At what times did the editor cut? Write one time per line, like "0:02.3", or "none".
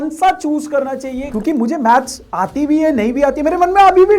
0:01.3